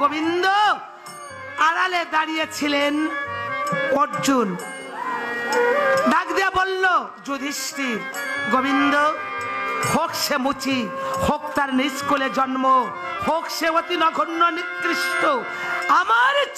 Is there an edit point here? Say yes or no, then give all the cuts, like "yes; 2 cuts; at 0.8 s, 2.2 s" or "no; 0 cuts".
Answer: no; 0 cuts